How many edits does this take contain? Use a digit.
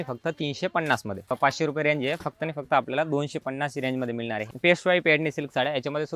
2